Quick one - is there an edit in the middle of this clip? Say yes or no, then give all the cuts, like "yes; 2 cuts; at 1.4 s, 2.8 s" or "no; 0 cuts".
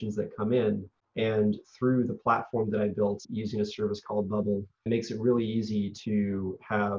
yes; 3 cuts; at 1.0 s, 3.3 s, 4.9 s